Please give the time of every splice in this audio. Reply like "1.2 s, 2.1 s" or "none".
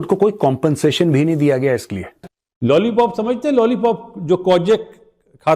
none